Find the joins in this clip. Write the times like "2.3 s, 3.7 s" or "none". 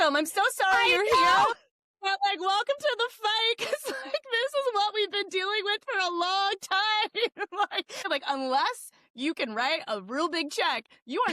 8.0 s